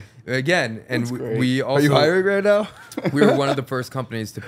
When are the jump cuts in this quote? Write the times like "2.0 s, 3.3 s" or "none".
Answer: none